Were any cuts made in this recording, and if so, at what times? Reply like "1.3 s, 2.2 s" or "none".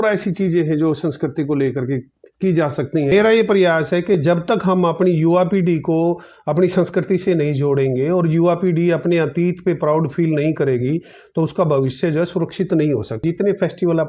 3.1 s, 13.2 s